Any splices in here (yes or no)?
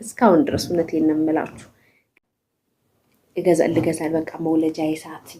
yes